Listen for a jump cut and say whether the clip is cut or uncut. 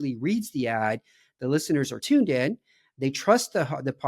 cut